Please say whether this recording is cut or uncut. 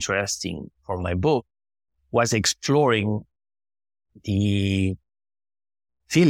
uncut